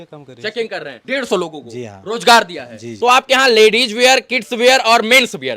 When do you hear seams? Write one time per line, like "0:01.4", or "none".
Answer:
0:01.0
0:02.9